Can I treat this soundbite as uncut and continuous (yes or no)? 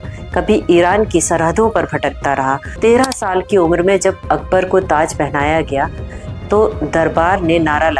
no